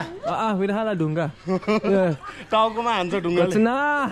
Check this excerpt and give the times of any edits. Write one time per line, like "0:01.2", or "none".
none